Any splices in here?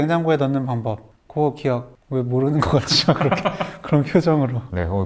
yes; 1 cut; at 1.1 s

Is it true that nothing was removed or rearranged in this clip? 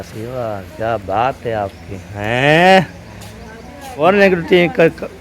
no; 1 cut; at 3.8 s

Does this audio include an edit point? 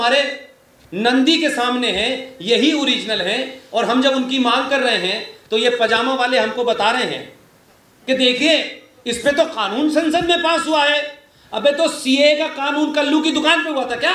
no; 0 cuts

